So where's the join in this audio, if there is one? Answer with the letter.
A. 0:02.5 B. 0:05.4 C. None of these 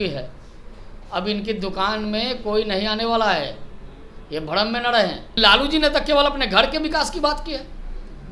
B